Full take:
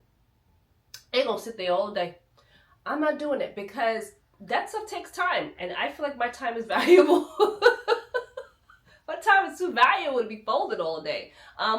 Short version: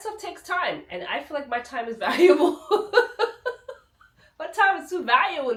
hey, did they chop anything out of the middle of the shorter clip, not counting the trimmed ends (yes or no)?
no